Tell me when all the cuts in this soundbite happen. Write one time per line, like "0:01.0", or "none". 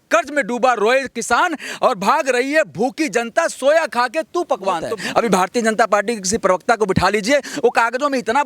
0:04.9